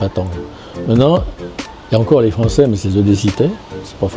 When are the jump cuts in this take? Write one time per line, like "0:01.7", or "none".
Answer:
none